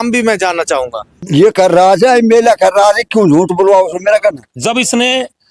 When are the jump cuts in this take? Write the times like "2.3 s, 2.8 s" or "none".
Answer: 1.2 s, 4.5 s